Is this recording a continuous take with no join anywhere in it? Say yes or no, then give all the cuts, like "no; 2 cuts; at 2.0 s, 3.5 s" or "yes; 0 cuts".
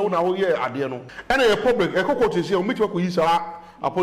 no; 1 cut; at 1.1 s